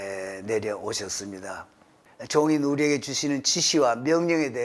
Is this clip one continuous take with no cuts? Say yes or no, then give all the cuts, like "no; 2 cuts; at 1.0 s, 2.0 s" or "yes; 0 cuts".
no; 1 cut; at 2.0 s